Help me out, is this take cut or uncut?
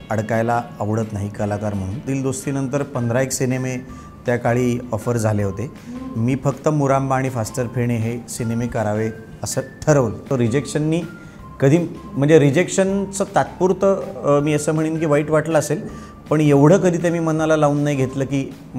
cut